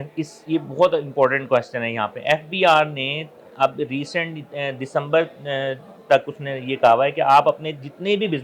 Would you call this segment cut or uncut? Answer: uncut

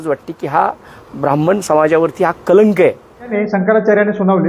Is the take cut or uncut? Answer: cut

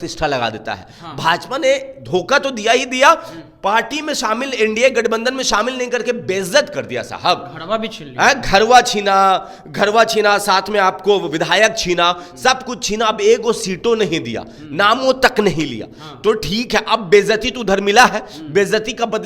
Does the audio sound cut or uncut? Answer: uncut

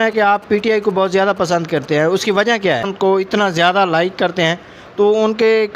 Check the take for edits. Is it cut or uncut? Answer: cut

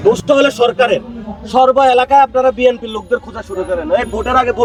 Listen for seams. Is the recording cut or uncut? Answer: uncut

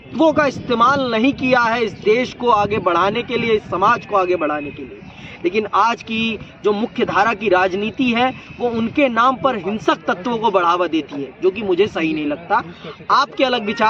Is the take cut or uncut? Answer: uncut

